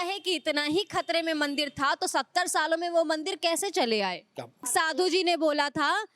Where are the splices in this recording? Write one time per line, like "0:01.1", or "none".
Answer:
0:04.6